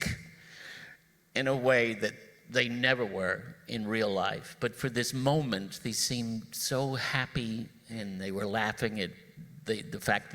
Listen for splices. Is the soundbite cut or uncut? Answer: cut